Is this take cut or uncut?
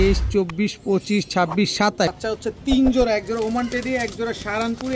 cut